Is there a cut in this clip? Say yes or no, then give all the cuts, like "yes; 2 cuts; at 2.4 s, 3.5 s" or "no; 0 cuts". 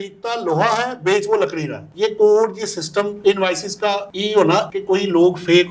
yes; 3 cuts; at 1.8 s, 3.1 s, 4.7 s